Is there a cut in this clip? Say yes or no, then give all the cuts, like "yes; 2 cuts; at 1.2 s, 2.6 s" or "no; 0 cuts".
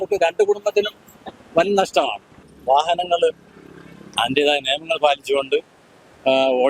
yes; 1 cut; at 2.5 s